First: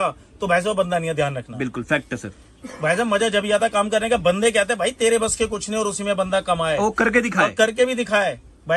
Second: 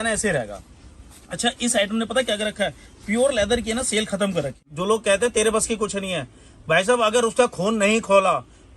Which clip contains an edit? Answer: second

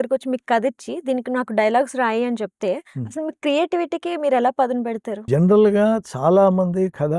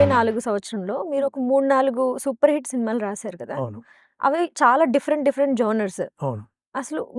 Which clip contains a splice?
first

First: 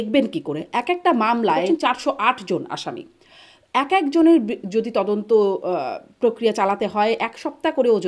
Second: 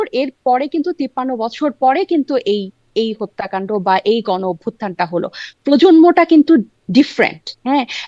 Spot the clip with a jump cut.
first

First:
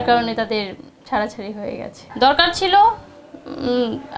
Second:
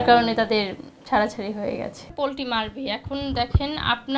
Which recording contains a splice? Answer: first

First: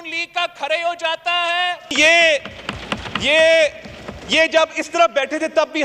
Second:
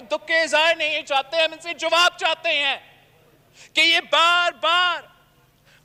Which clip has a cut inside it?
first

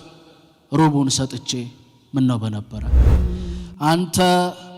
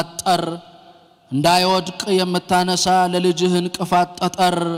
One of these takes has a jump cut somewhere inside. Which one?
first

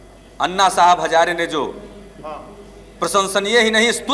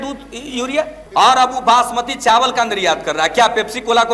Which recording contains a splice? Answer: second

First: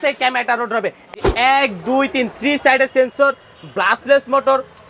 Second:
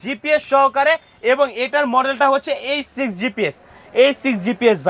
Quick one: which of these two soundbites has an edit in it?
first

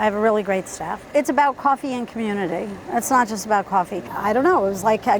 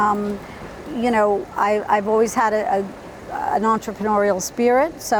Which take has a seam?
first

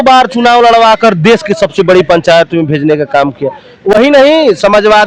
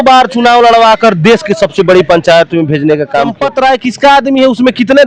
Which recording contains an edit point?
second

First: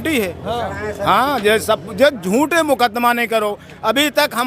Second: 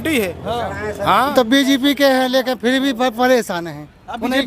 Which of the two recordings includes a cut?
second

